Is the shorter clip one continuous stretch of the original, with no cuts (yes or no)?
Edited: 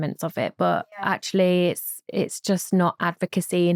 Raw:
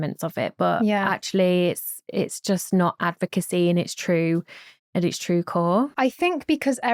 yes